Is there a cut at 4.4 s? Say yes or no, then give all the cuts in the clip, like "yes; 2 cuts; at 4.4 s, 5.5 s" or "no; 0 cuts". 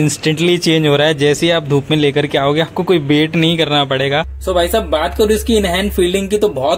yes; 1 cut; at 4.4 s